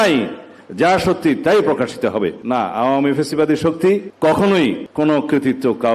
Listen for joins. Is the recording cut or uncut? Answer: cut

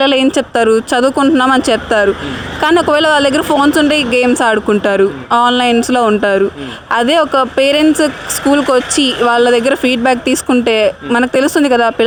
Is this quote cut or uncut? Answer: uncut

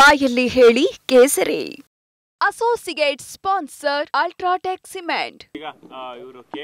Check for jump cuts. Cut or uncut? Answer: cut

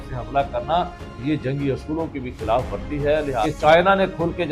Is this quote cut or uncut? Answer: cut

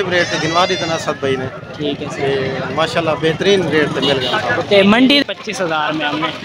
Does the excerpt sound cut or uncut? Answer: cut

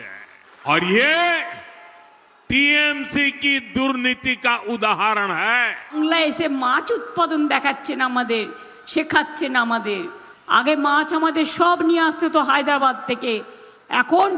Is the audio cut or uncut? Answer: cut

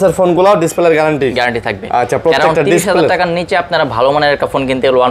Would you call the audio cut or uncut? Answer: uncut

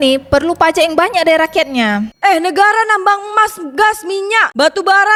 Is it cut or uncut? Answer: uncut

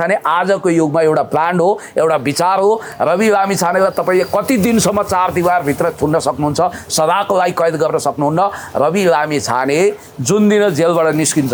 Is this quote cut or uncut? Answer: uncut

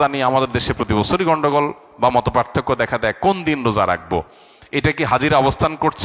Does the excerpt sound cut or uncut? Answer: uncut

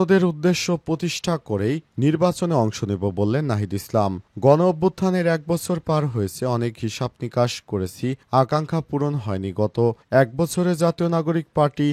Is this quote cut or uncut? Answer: uncut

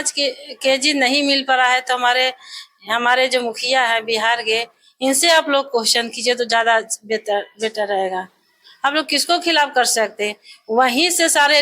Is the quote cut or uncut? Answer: uncut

